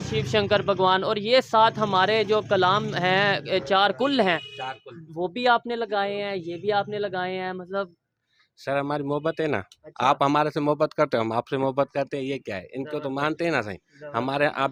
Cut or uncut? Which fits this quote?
uncut